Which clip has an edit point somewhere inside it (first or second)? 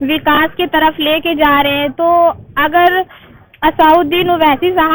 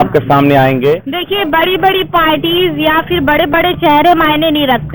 second